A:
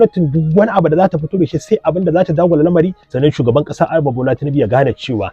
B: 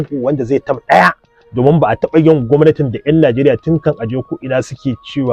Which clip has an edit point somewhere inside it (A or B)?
A